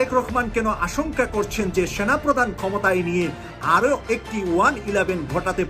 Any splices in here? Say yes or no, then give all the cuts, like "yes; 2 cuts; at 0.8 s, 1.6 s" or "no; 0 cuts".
no; 0 cuts